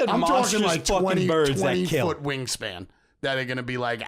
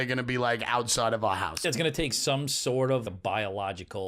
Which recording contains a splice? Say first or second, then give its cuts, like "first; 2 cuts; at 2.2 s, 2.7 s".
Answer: second; 2 cuts; at 1.7 s, 3.0 s